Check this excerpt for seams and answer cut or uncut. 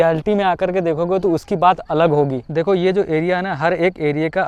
uncut